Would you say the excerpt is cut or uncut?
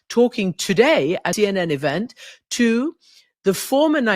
cut